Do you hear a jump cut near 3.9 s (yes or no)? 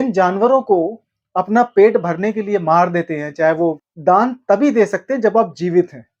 yes